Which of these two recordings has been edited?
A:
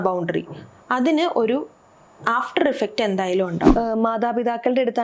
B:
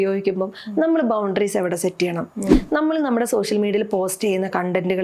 A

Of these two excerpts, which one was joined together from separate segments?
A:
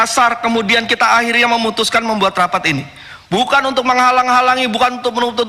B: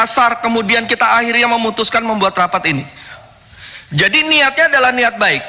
B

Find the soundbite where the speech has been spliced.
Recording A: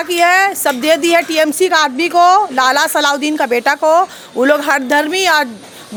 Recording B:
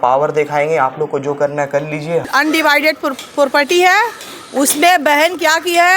B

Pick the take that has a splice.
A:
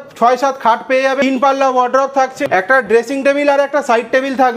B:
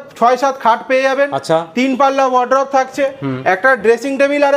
A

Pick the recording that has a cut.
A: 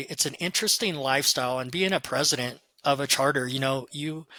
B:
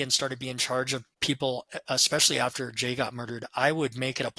B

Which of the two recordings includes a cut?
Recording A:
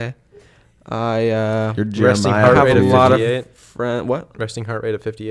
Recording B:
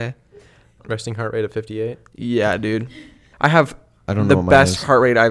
B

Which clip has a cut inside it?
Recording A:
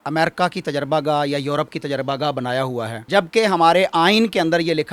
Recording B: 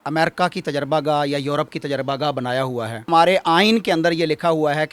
B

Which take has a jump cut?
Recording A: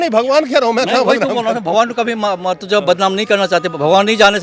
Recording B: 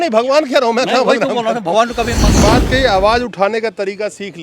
B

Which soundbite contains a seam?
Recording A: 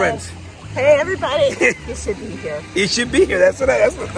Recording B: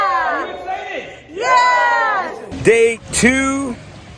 B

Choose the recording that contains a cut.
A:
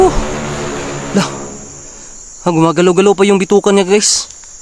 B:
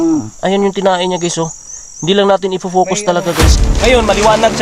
B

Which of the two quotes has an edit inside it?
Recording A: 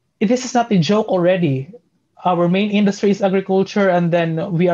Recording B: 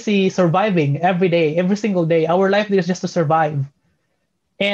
A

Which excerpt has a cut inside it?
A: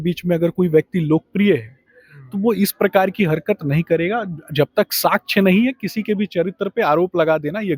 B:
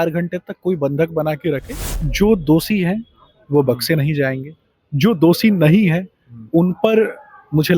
B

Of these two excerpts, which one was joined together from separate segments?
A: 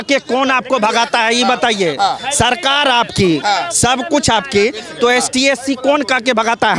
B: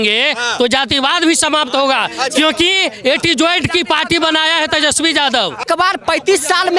B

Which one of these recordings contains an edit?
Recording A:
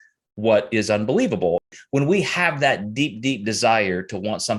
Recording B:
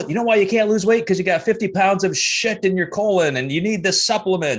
A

